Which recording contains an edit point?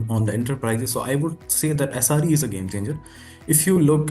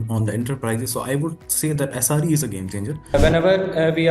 second; 1 cut; at 3.1 s

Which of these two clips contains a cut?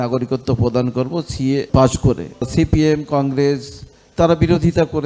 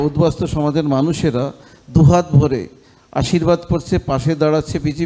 first; 2 cuts; at 1.7 s, 2.5 s

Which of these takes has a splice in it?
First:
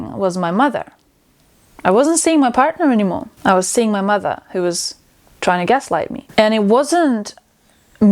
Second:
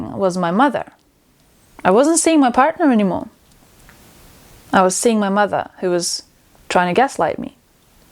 first; 2 cuts; at 3.3 s, 6.2 s

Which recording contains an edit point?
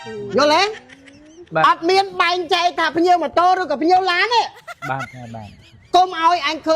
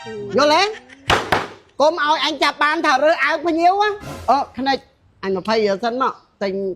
second; 2 cuts; at 0.9 s, 4.1 s

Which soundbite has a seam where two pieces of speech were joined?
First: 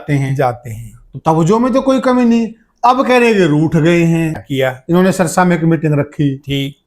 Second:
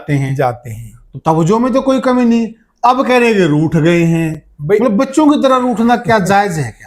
first; 1 cut; at 4.4 s

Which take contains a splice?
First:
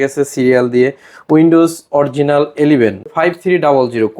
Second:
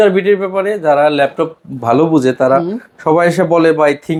first; 1 cut; at 3.1 s

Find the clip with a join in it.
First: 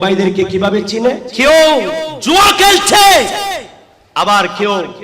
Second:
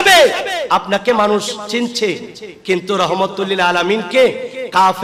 first; 1 cut; at 1.3 s

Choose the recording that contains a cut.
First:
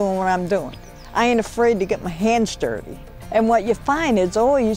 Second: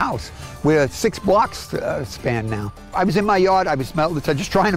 second; 1 cut; at 2.9 s

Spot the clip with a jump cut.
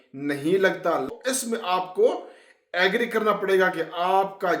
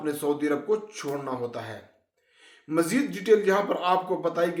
first; 1 cut; at 1.1 s

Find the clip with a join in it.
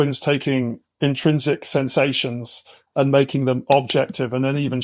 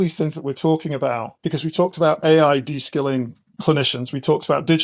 second; 2 cuts; at 1.3 s, 3.4 s

